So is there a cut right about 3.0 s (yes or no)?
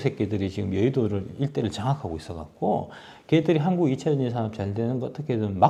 no